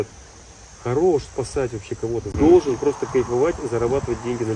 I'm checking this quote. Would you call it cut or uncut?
cut